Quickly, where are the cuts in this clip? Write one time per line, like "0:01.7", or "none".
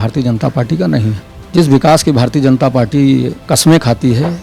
0:01.3
0:03.4